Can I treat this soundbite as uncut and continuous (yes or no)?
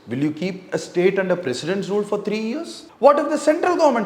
no